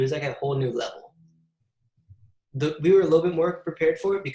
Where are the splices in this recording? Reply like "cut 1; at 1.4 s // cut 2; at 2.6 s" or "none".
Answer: none